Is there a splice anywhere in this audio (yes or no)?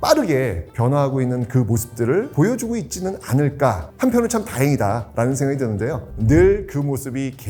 no